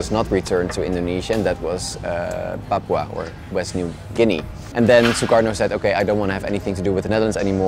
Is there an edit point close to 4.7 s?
yes; 1 cut; at 4.7 s

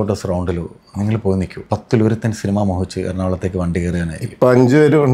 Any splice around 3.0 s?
no; 1 cut; at 1.6 s

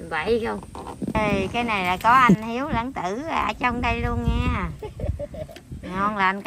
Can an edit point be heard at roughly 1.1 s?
yes; 1 cut; at 1.1 s

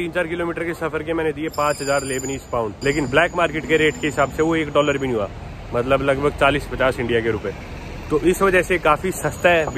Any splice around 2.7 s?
yes; 1 cut; at 2.7 s

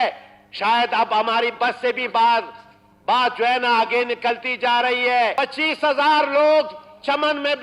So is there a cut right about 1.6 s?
no; 1 cut; at 5.3 s

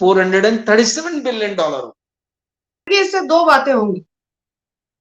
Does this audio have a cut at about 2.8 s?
yes; 1 cut; at 2.8 s

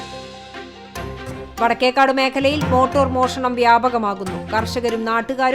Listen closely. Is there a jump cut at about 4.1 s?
no; 1 cut; at 1.4 s

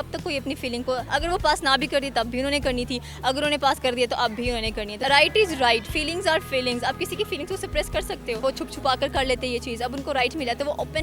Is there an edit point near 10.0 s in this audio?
no; 2 cuts; at 5.0 s, 8.4 s

